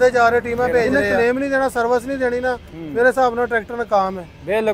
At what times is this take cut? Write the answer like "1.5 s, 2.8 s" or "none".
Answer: 1.0 s